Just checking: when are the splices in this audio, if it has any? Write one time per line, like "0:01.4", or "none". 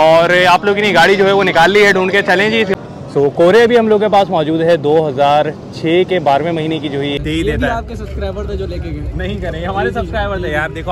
0:02.7
0:07.2